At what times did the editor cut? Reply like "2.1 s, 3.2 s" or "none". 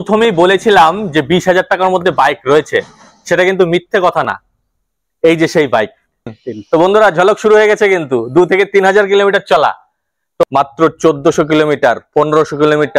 6.3 s, 10.4 s